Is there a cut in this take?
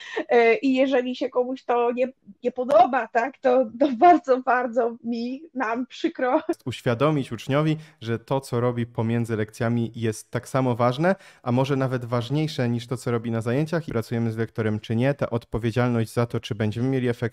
yes; 2 cuts; at 6.7 s, 13.9 s

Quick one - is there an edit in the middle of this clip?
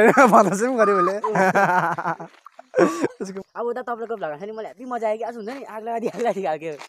yes; 1 cut; at 3.3 s

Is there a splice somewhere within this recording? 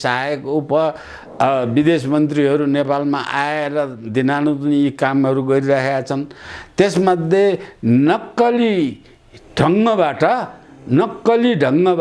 no; 0 cuts

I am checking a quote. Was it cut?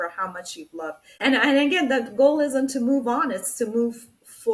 yes; 1 cut; at 1.1 s

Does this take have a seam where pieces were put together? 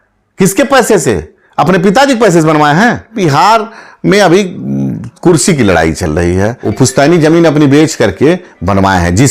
yes; 2 cuts; at 3.2 s, 6.6 s

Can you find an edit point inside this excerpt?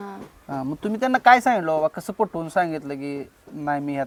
no; 0 cuts

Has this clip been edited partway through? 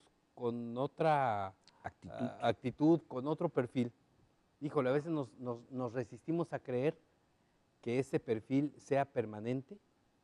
no; 0 cuts

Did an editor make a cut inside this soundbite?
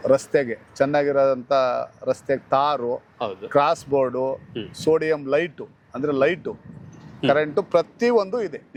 no; 0 cuts

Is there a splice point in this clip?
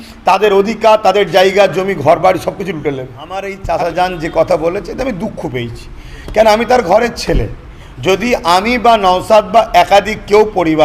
yes; 1 cut; at 3.5 s

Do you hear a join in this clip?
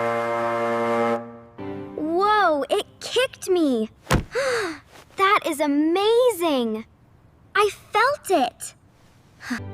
yes; 1 cut; at 1.4 s

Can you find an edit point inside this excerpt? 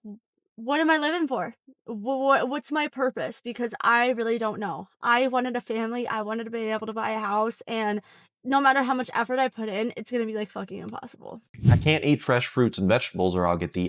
yes; 1 cut; at 11.8 s

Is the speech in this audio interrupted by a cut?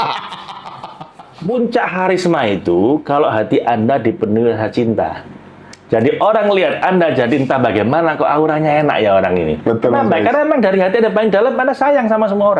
yes; 1 cut; at 1.3 s

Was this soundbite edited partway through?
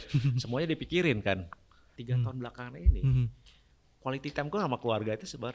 yes; 1 cut; at 1.9 s

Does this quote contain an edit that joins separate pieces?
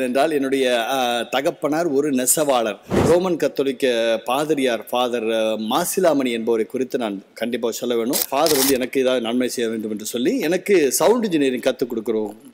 yes; 2 cuts; at 2.9 s, 8.3 s

